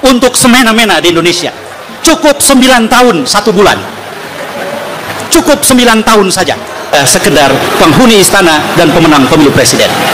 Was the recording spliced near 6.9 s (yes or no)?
yes